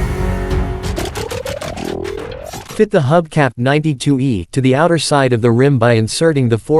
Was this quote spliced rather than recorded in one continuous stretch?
no; 0 cuts

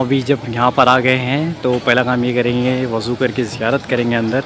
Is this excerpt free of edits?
yes; 0 cuts

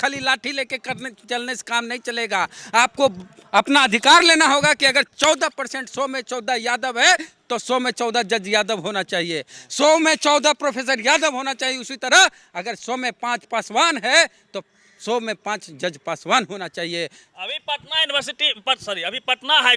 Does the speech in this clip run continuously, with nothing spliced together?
yes; 0 cuts

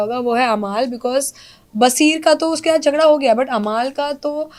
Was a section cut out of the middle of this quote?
no; 0 cuts

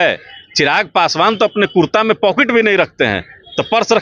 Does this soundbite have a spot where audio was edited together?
no; 0 cuts

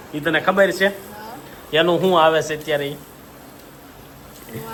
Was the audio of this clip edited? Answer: no; 0 cuts

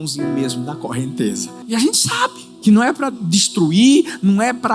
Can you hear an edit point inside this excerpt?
yes; 2 cuts; at 1.5 s, 2.5 s

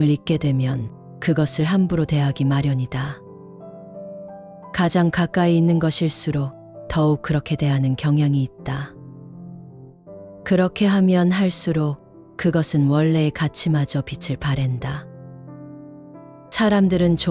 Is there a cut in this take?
no; 0 cuts

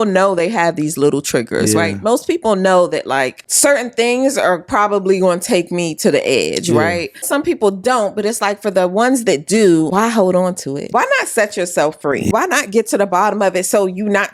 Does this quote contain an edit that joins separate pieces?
yes; 5 cuts; at 3.4 s, 7.3 s, 9.9 s, 10.8 s, 12.3 s

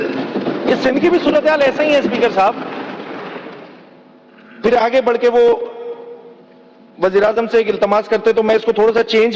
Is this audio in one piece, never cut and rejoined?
yes; 0 cuts

